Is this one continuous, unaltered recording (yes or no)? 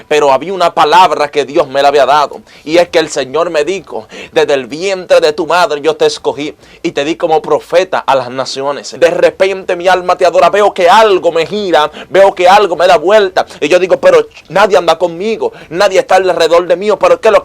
no